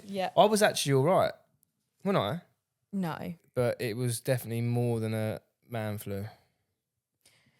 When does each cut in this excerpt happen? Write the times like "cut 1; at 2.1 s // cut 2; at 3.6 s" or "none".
cut 1; at 3.4 s